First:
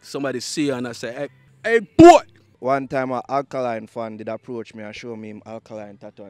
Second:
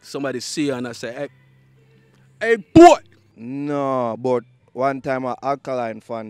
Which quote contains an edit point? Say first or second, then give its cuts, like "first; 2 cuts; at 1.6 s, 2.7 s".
first; 2 cuts; at 1.4 s, 2.5 s